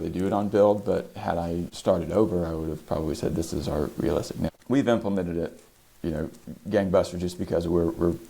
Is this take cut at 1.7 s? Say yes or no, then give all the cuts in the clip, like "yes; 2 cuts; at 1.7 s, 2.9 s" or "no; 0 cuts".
yes; 2 cuts; at 1.7 s, 4.5 s